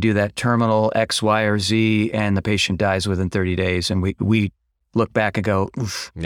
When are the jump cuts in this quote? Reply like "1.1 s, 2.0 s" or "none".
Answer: none